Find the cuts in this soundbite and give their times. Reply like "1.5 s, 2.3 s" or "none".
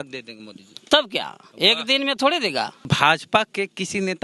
2.9 s